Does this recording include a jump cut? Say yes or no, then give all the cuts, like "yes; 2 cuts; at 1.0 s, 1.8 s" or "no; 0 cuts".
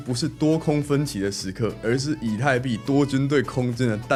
no; 0 cuts